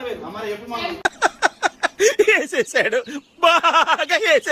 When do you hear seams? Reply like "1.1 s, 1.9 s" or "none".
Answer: 0.9 s

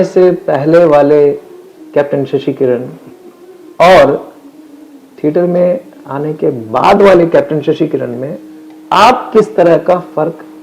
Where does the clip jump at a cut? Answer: none

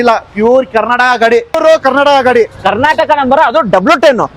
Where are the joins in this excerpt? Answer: 1.6 s

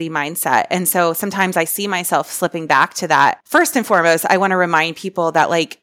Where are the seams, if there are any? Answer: 3.4 s

